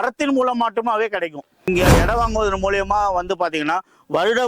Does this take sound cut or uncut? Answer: cut